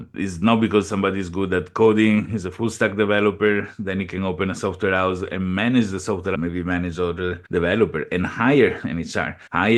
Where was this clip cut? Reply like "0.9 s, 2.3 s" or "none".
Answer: 6.3 s

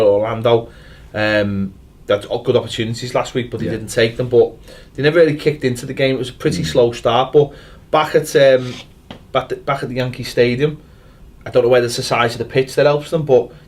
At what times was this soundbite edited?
none

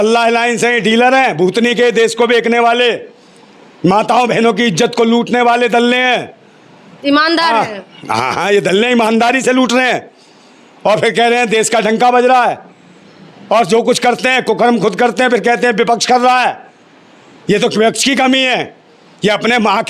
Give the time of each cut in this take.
none

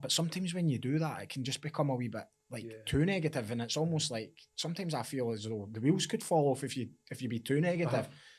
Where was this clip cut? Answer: none

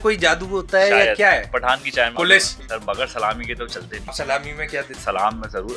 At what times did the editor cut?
2.1 s, 4.1 s

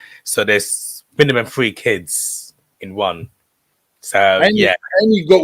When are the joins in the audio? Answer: none

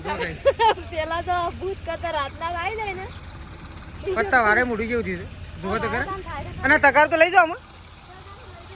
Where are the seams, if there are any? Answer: none

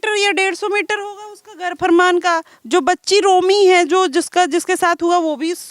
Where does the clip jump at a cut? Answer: none

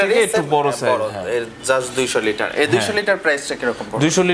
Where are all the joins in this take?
none

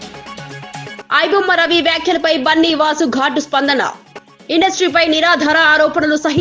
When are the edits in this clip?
1.0 s

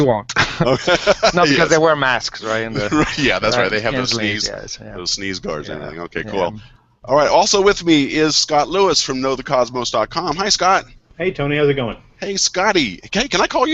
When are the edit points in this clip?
7.3 s

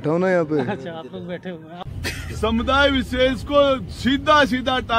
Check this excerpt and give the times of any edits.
1.8 s

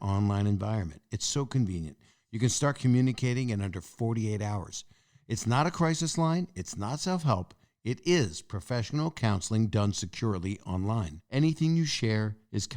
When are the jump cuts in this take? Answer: 11.2 s

